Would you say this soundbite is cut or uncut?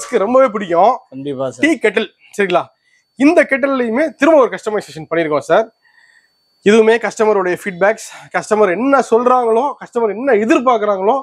uncut